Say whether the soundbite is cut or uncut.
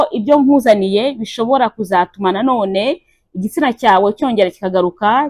uncut